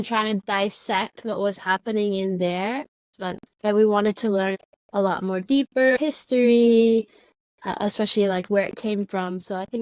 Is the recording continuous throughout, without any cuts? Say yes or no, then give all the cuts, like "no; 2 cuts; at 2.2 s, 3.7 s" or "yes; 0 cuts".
no; 3 cuts; at 3.2 s, 4.6 s, 6.0 s